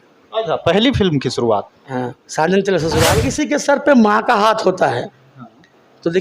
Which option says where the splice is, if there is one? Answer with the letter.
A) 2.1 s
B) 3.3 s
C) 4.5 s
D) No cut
B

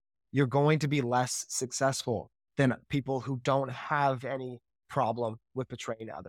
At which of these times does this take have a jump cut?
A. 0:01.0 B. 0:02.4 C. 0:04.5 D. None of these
D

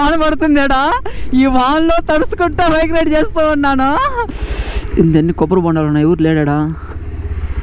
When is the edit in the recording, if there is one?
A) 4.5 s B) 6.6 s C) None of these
A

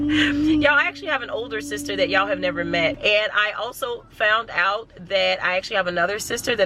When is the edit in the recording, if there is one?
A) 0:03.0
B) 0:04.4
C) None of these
A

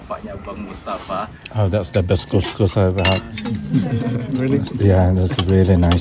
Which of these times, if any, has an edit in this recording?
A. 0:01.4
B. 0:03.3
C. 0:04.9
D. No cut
A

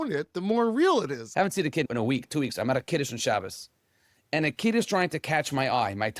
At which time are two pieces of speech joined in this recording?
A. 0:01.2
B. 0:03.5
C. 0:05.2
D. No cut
A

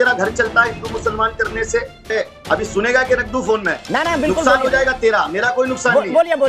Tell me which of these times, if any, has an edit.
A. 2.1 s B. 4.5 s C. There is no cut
A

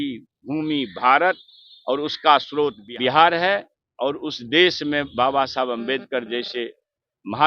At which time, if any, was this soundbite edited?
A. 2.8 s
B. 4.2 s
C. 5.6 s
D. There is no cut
A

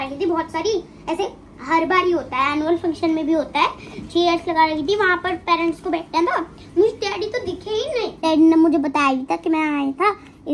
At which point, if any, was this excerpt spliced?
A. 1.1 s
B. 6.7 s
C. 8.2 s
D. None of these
C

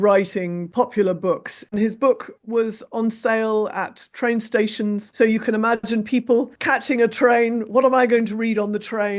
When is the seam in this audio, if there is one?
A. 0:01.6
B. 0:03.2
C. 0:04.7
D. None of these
A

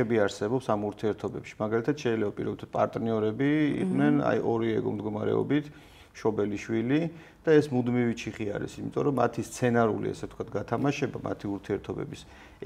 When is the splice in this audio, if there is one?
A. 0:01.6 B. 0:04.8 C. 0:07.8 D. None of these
D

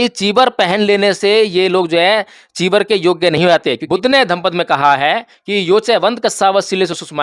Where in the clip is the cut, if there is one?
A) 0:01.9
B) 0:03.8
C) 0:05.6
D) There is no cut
B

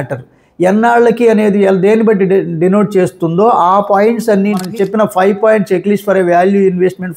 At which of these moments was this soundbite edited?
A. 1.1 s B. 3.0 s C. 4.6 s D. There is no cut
C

